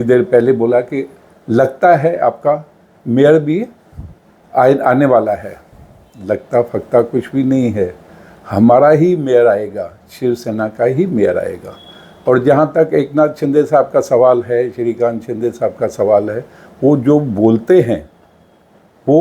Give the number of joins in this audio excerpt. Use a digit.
0